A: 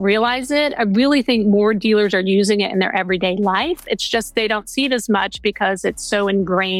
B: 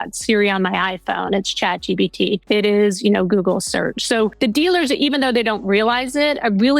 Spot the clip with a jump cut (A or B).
B